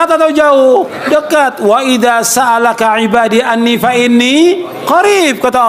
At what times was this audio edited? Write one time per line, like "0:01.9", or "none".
0:01.0
0:04.7